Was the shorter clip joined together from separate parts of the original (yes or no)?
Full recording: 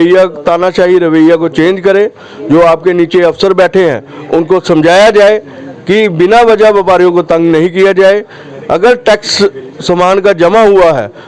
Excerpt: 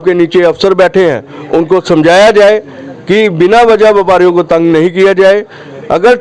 no